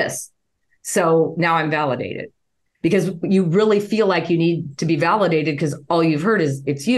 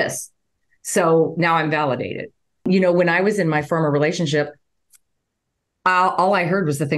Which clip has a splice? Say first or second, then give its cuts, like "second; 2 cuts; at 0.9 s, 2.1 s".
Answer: second; 1 cut; at 2.7 s